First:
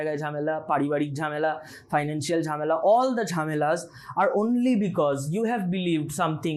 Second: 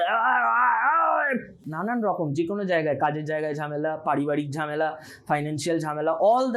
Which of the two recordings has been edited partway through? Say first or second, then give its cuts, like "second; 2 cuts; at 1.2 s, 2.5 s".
second; 1 cut; at 1.7 s